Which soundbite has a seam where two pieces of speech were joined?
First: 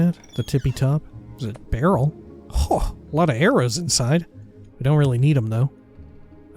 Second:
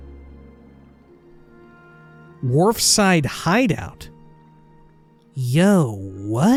first; 1 cut; at 1.2 s

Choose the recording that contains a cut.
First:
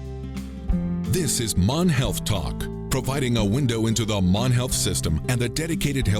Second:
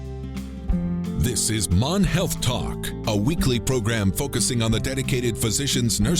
second; 1 cut; at 1.1 s

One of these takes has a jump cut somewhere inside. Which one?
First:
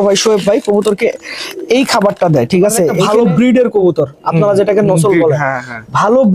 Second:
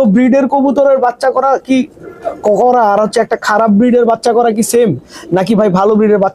first; 1 cut; at 3.0 s

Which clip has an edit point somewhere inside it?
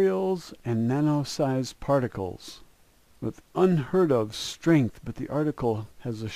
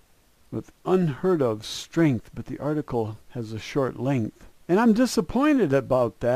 second; 1 cut; at 4.8 s

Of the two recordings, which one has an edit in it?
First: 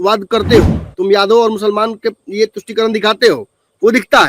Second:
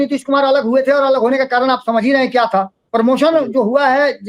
second; 1 cut; at 2.8 s

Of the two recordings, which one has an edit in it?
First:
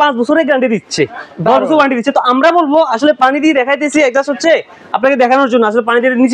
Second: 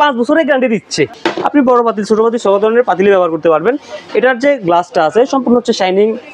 second; 1 cut; at 1.2 s

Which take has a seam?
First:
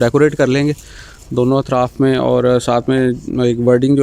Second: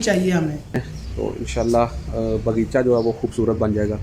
second; 1 cut; at 0.9 s

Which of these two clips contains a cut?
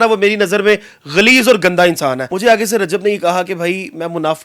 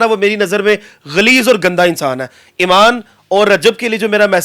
first; 1 cut; at 2.3 s

